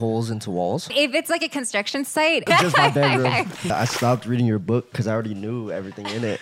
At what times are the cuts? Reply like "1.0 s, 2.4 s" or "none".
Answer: 0.9 s, 2.5 s, 3.7 s